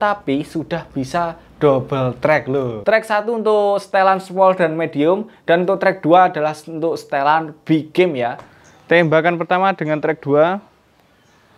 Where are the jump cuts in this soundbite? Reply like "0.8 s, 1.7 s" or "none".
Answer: 2.7 s, 8.5 s